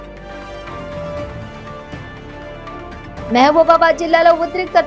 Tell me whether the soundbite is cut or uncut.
uncut